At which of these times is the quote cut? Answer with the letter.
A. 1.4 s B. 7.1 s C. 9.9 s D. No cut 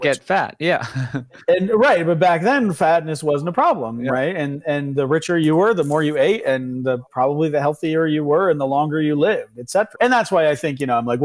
C